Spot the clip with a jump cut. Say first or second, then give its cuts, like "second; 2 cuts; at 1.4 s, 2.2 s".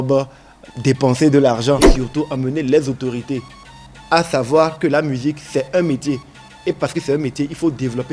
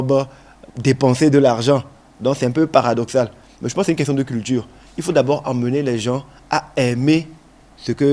first; 1 cut; at 2.0 s